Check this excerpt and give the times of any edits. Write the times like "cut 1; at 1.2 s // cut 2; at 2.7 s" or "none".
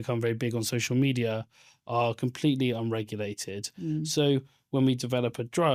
none